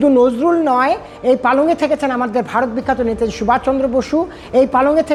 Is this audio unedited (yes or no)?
yes